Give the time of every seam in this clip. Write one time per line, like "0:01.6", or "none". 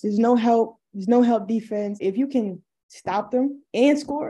0:02.0

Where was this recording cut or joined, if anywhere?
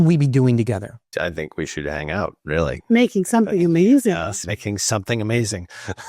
0:01.0

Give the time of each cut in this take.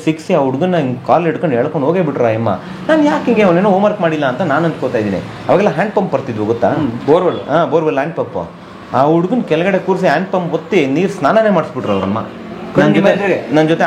none

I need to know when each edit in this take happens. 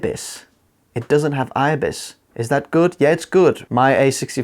none

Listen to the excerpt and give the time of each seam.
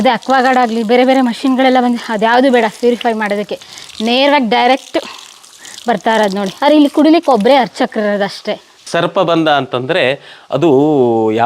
0:08.8

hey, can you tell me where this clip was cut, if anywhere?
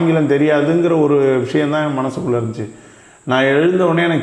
none

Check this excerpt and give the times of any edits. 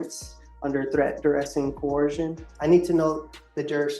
0:02.5

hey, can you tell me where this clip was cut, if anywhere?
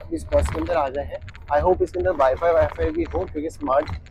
none

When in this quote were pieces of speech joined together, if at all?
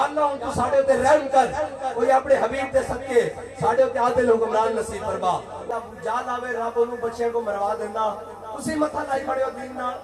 0:05.6

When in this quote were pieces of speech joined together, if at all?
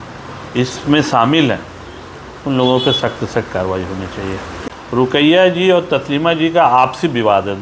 0:04.5

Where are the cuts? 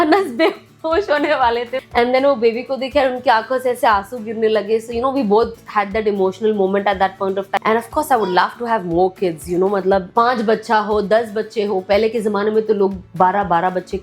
0:01.8
0:07.6
0:10.1

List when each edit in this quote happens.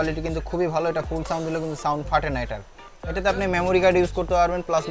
none

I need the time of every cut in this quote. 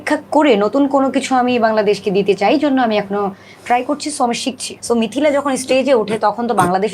0:04.8

